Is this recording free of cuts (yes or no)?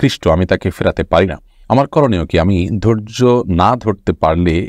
yes